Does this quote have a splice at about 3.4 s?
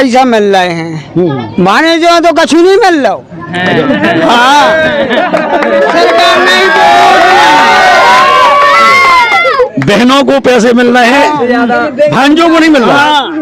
no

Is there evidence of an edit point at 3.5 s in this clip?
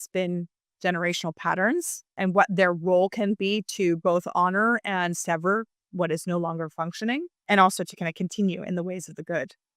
no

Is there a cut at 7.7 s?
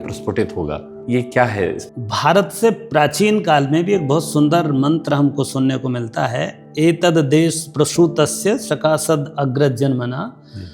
no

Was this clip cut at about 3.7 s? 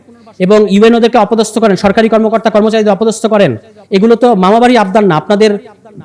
no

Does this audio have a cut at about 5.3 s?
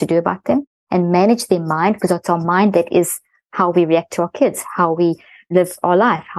yes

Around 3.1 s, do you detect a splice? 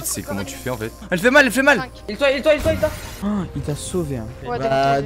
yes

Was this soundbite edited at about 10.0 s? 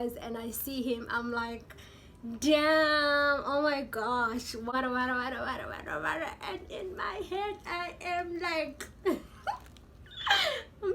no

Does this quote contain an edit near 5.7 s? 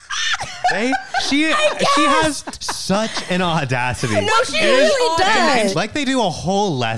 yes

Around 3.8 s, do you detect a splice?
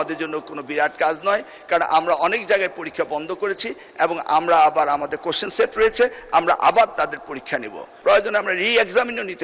no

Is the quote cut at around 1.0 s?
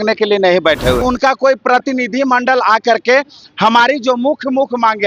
yes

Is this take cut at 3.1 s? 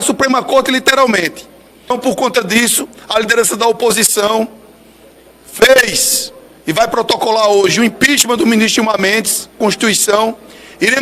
no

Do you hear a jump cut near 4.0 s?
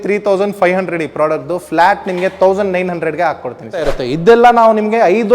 yes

